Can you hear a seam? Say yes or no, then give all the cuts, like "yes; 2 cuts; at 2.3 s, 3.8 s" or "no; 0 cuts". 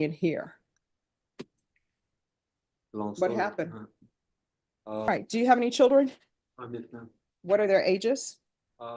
yes; 1 cut; at 5.1 s